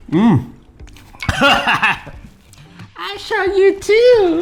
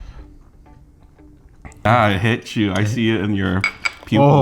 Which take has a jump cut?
second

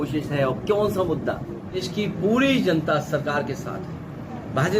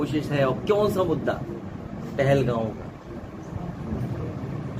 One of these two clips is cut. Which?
first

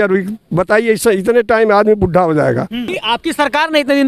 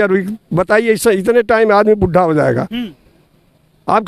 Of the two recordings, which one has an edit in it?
first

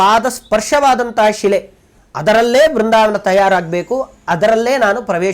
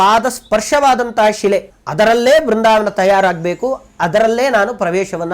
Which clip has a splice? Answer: second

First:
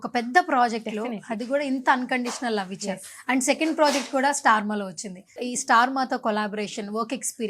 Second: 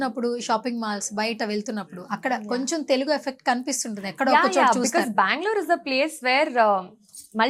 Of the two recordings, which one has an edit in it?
first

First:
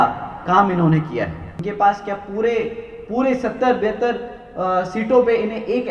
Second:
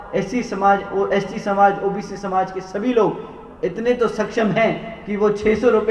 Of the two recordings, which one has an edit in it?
first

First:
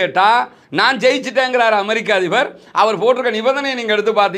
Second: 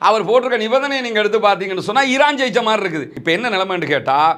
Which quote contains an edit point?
second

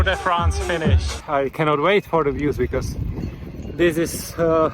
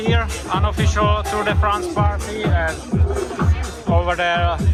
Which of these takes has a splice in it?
first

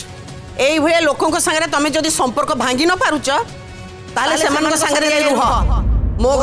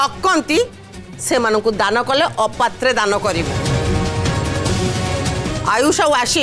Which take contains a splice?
second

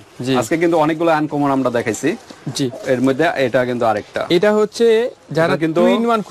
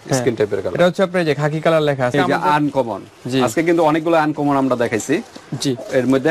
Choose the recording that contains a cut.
second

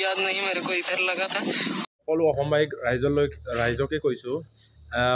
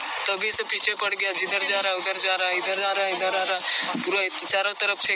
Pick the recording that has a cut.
first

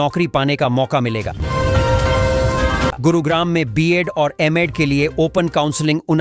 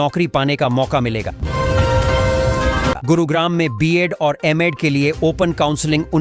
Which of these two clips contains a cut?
second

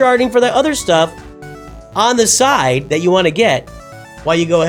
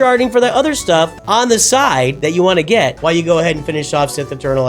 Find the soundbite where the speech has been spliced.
second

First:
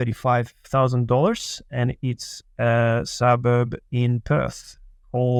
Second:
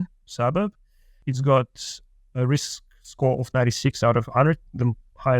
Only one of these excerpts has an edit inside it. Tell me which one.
second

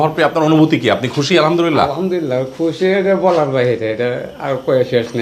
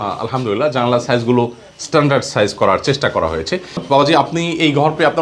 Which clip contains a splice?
second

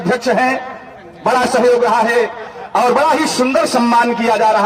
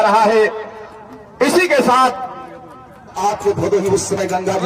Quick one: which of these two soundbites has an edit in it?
second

